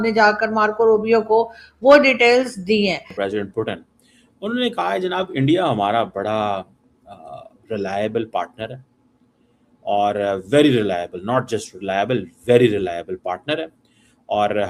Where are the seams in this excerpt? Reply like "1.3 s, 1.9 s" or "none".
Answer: 3.1 s